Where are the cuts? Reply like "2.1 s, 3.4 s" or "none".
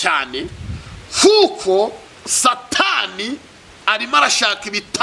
none